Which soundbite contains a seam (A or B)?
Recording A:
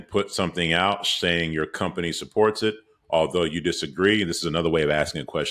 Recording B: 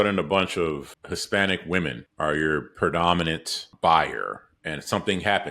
B